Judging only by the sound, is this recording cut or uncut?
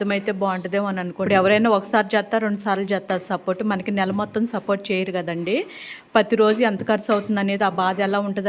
cut